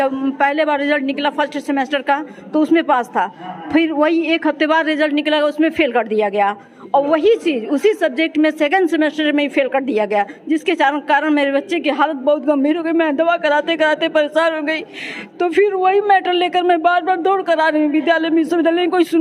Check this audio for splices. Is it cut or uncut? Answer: uncut